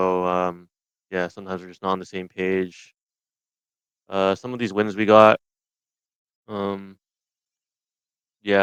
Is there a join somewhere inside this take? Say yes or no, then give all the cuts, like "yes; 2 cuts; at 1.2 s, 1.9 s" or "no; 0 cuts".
no; 0 cuts